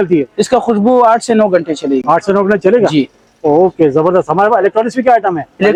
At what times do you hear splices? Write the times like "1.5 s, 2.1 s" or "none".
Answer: none